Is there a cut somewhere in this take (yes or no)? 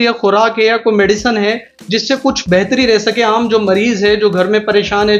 no